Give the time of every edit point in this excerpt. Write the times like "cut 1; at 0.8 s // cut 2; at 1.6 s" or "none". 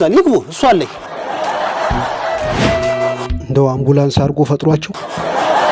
cut 1; at 2.6 s